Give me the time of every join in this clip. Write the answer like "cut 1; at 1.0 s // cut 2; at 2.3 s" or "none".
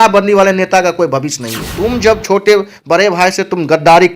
cut 1; at 1.7 s